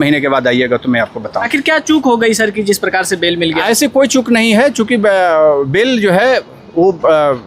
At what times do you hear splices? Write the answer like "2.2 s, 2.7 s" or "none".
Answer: 1.4 s